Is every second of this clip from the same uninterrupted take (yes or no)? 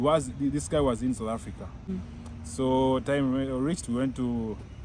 no